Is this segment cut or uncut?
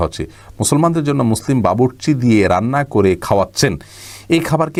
uncut